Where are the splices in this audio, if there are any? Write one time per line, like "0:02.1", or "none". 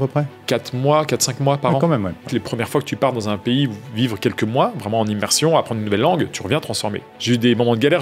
0:02.3
0:07.1